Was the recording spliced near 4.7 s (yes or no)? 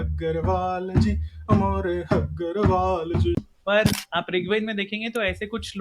no